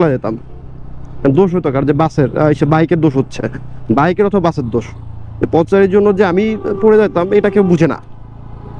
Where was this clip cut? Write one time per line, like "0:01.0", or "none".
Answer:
none